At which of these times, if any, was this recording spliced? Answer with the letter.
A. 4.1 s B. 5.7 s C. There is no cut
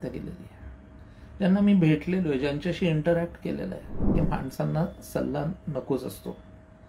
A